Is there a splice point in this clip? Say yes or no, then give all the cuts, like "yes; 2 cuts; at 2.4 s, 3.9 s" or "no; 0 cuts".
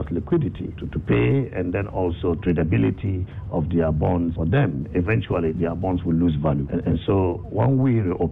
yes; 3 cuts; at 0.9 s, 4.4 s, 6.7 s